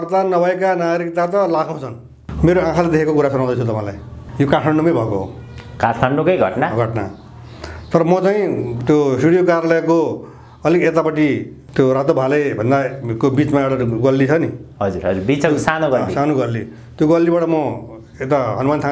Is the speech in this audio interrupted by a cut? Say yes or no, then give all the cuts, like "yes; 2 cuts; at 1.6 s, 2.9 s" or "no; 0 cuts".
yes; 3 cuts; at 2.2 s, 8.7 s, 11.6 s